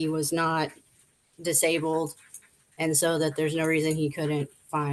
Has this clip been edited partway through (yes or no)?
no